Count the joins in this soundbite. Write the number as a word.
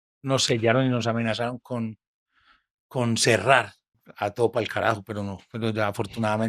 one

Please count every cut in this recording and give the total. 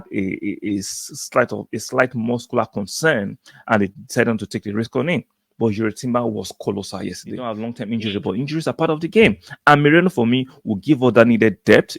one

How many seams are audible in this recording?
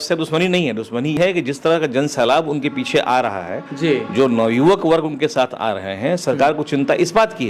one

